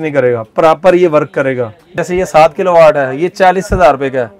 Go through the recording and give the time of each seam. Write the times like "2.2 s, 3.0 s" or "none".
2.0 s